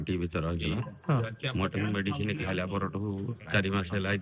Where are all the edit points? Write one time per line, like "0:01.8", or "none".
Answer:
none

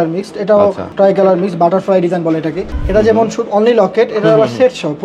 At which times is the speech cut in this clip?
0:00.8
0:02.7

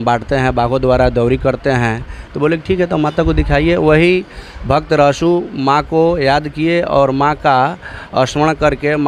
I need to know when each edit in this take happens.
none

